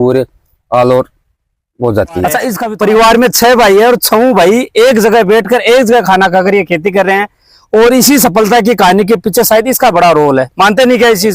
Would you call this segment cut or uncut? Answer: cut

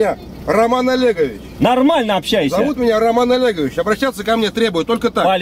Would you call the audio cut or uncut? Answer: uncut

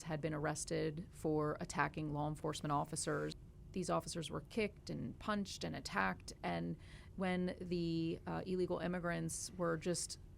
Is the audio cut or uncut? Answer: cut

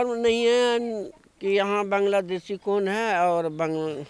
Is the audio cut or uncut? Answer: uncut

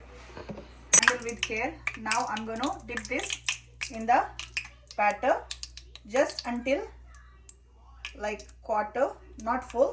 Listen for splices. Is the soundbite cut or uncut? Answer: cut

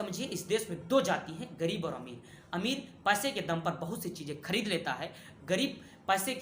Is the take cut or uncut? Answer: uncut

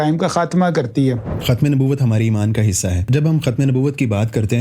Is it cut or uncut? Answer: cut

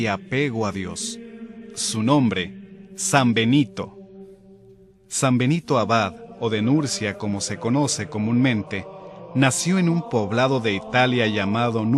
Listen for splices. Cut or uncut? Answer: uncut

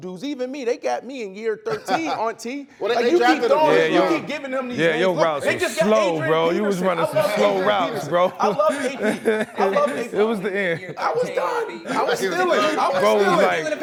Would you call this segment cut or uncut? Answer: uncut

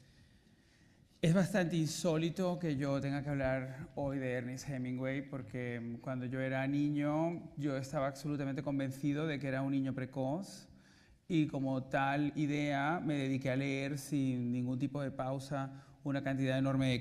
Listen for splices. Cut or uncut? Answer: cut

